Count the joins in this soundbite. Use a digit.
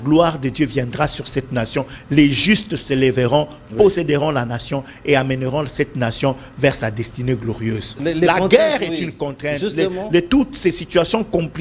1